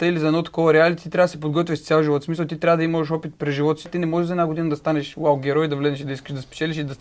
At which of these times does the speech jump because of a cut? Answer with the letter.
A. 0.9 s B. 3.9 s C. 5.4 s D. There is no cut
B